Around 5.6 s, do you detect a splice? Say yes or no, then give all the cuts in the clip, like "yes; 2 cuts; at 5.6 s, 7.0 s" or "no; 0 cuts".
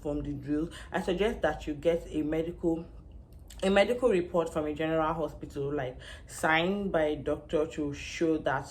no; 0 cuts